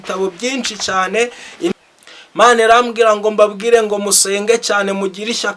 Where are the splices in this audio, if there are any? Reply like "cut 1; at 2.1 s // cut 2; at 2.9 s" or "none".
cut 1; at 1.7 s